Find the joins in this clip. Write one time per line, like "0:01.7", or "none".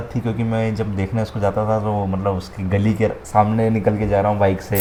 none